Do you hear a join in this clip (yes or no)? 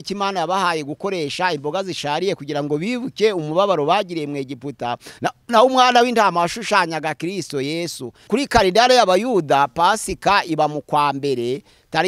yes